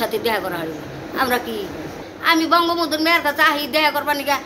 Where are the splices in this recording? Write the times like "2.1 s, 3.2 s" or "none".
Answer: 2.0 s